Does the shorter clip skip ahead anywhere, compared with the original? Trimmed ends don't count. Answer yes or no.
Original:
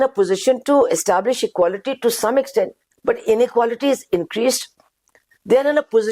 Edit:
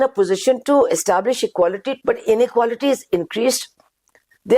yes